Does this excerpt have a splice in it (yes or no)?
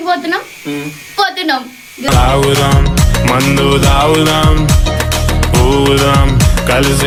no